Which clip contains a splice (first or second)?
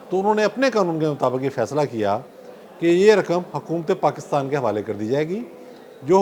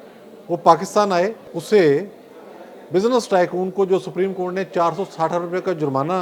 second